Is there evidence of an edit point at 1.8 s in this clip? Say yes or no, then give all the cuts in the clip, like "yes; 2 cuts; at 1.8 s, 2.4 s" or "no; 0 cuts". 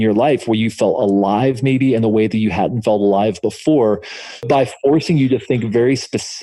no; 1 cut; at 4.4 s